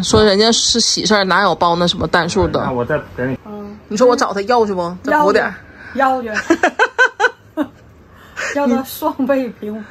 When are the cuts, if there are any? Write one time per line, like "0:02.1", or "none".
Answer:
0:03.4